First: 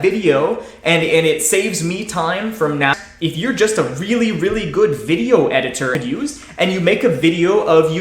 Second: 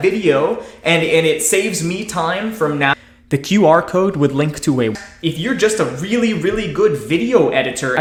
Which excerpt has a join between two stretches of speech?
first; 2 cuts; at 3.1 s, 5.9 s

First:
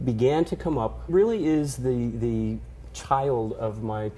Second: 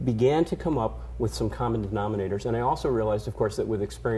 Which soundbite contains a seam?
second; 1 cut; at 1.0 s

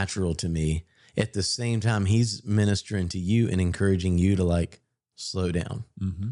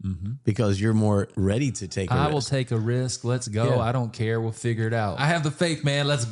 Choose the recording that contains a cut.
second; 2 cuts; at 1.3 s, 5.2 s

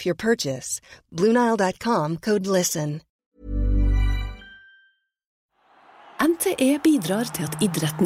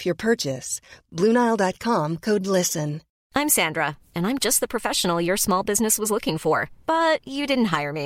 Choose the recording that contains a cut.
first; 2 cuts; at 3.1 s, 5.7 s

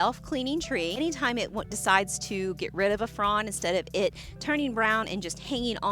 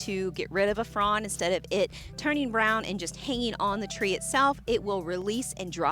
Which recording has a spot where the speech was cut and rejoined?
first; 1 cut; at 1.0 s

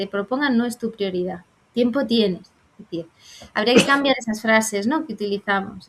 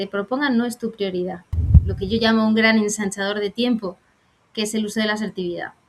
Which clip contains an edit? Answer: second; 1 cut; at 1.6 s

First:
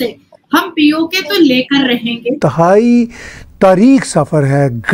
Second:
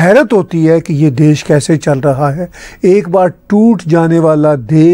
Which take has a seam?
first; 1 cut; at 2.4 s

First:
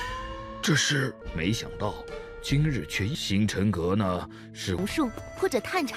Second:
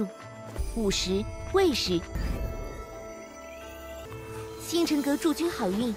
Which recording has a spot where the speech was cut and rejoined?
first; 1 cut; at 4.8 s

